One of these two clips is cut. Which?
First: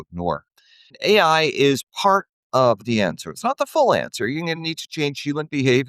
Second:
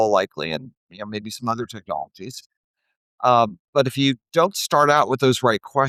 first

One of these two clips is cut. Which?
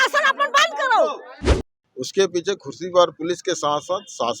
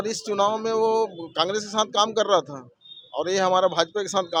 first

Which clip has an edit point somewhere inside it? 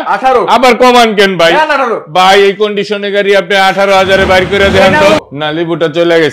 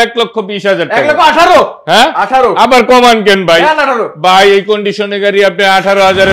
first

